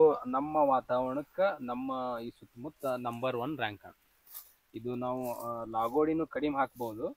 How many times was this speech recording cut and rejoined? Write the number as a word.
zero